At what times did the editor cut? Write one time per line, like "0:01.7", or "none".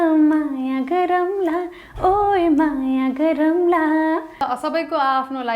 0:04.4